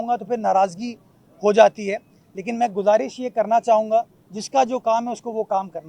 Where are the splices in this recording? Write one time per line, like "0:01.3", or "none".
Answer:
none